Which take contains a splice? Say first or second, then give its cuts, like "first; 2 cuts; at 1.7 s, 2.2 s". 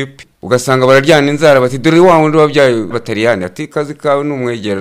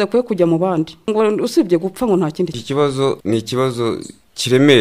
second; 1 cut; at 2.4 s